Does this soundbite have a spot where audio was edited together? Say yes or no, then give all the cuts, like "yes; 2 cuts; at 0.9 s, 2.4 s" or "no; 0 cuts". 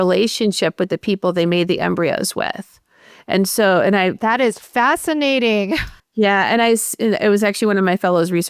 no; 0 cuts